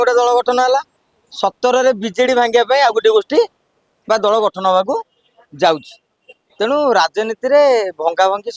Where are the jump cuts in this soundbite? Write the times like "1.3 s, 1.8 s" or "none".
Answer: none